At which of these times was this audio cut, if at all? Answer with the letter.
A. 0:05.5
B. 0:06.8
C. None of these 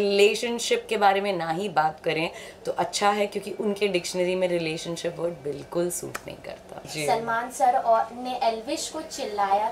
C